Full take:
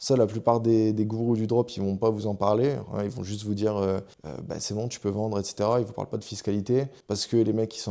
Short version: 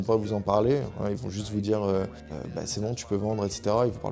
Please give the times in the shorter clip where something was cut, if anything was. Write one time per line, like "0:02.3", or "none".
none